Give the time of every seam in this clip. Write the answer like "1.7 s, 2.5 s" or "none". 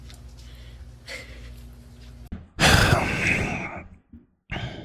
none

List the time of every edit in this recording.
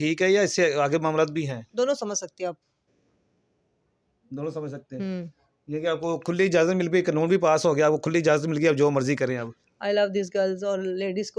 none

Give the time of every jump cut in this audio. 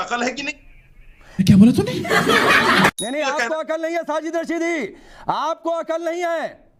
none

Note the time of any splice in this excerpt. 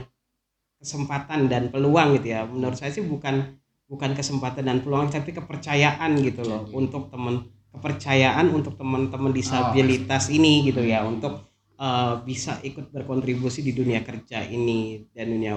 none

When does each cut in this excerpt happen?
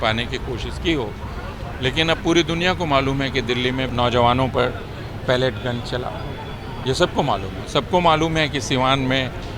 none

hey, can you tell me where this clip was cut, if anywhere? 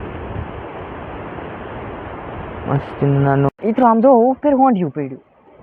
3.5 s

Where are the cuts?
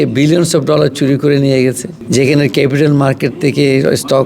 1.9 s

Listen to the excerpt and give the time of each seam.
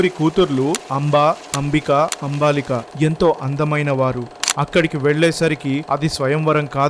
4.4 s

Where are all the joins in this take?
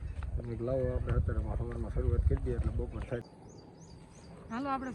3.3 s

